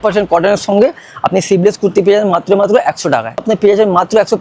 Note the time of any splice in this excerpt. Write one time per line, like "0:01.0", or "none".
0:03.4

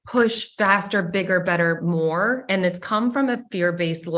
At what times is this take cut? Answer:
none

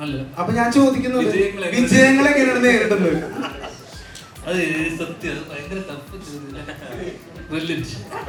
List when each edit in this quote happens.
none

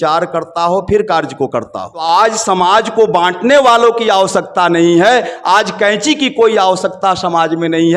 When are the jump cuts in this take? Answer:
0:01.9

